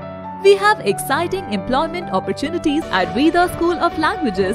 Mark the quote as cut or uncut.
cut